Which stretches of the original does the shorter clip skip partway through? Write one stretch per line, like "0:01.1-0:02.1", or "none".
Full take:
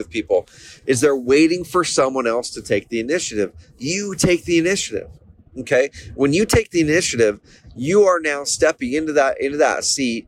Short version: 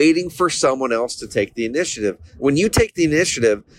0:03.6-0:06.0